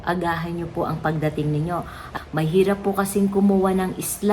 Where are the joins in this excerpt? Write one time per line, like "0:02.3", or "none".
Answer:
0:02.1